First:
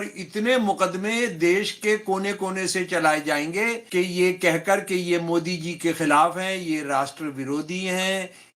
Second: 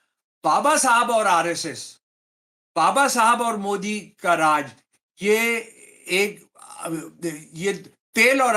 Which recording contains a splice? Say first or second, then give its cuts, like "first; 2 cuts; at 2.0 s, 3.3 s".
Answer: first; 1 cut; at 3.8 s